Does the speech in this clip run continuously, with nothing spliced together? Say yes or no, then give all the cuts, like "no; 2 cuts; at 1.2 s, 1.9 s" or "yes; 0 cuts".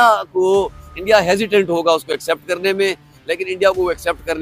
yes; 0 cuts